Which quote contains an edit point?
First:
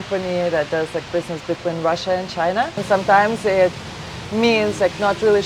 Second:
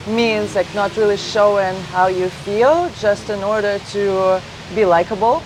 first; 1 cut; at 2.8 s

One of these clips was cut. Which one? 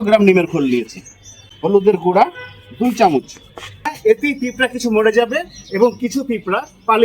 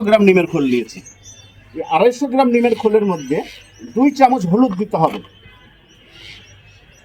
first; 2 cuts; at 1.7 s, 4.0 s

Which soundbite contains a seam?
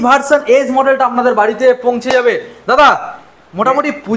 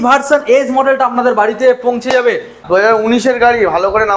second; 1 cut; at 2.6 s

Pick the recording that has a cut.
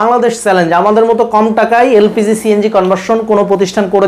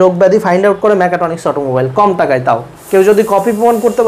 second; 1 cut; at 2.7 s

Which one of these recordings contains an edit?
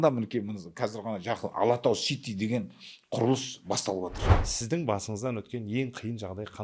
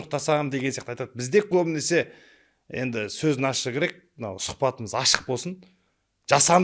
first; 1 cut; at 4.2 s

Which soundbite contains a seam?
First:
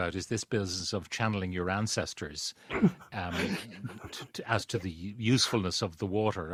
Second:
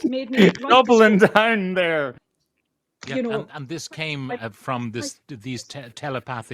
second; 1 cut; at 2.1 s

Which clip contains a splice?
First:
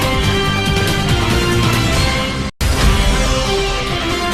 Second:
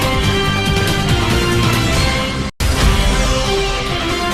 first; 1 cut; at 2.5 s

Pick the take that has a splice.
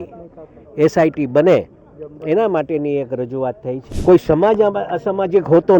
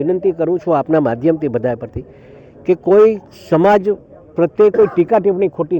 first; 1 cut; at 3.9 s

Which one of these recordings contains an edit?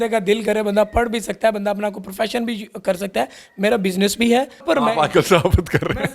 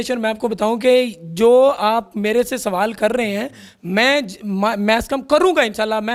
first; 3 cuts; at 1.5 s, 3.3 s, 4.6 s

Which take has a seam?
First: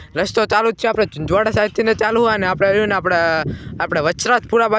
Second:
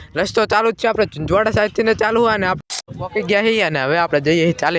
second; 1 cut; at 2.6 s

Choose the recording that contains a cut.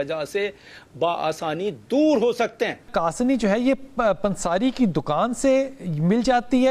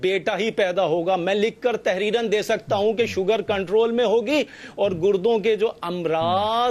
first; 1 cut; at 2.9 s

